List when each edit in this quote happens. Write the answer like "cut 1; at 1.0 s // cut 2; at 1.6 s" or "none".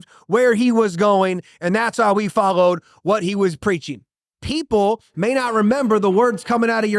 cut 1; at 4.3 s